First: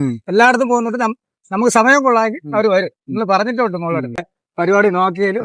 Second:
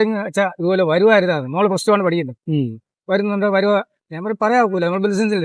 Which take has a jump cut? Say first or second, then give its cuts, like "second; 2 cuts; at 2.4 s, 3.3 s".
first; 1 cut; at 4.3 s